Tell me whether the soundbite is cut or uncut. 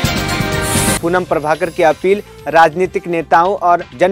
cut